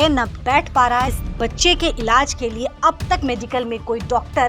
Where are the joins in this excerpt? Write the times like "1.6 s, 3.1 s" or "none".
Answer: 1.1 s